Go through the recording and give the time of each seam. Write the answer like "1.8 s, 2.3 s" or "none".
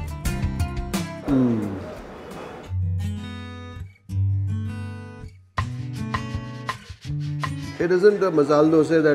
2.5 s